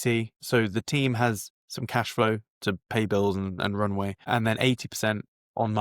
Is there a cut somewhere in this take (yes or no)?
yes